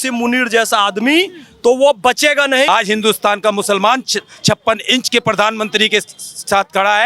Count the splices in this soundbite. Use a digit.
1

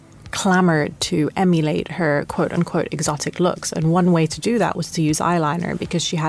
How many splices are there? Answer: 0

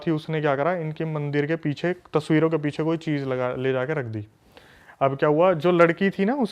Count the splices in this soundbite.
0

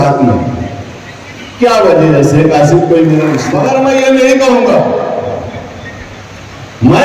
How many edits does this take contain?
1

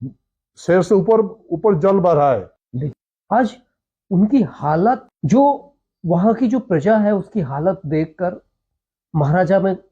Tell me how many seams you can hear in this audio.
2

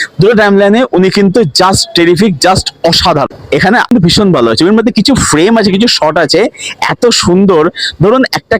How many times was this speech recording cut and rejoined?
1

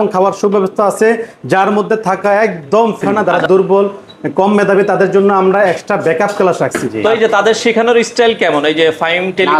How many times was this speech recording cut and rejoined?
2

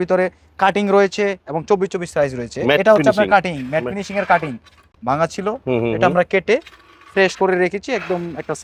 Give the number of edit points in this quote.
0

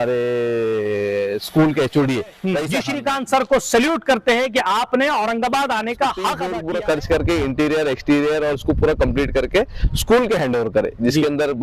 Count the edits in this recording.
2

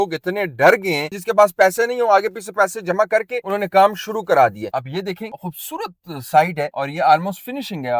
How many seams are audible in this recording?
3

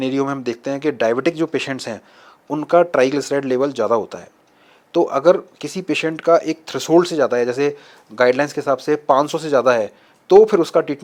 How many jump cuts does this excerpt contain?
0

